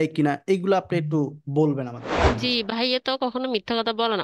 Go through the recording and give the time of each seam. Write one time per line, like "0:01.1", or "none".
0:02.1